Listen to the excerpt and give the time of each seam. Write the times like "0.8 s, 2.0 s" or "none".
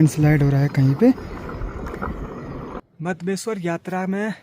2.7 s